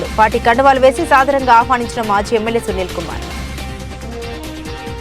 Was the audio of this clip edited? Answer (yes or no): yes